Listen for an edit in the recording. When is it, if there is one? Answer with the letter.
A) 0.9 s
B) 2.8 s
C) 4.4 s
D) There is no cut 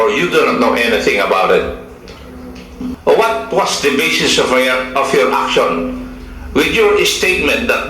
B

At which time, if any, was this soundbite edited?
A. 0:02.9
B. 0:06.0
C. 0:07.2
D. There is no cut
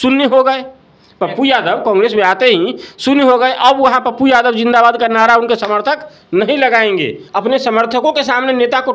C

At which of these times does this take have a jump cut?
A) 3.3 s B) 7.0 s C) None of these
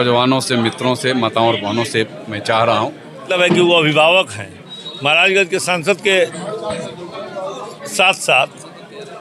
A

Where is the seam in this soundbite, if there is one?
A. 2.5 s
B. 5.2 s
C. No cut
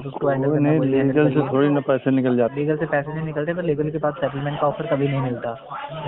A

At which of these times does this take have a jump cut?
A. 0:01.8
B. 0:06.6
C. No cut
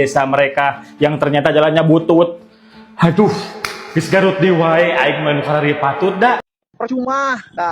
B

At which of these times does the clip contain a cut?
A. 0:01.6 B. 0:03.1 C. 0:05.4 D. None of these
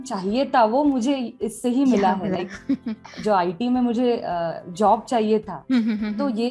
B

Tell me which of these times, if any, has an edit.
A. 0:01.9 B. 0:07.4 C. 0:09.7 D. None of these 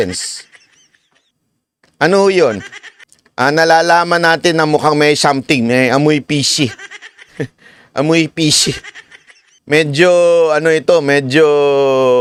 D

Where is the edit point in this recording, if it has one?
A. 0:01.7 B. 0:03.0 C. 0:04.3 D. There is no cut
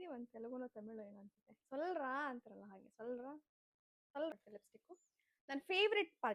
C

